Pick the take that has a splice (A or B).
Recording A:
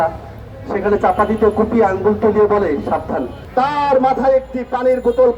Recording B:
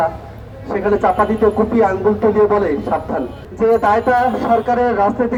A